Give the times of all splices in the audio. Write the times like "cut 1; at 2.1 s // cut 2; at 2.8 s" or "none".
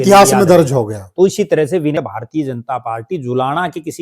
cut 1; at 2.0 s